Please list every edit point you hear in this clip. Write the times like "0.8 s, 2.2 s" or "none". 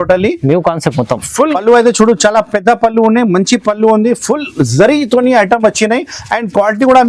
1.6 s